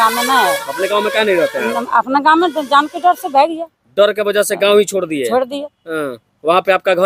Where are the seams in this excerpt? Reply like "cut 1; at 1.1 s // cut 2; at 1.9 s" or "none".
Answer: none